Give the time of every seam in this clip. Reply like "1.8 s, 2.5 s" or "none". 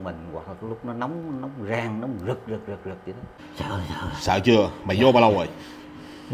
3.3 s